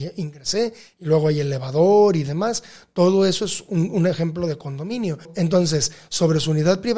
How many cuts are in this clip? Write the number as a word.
one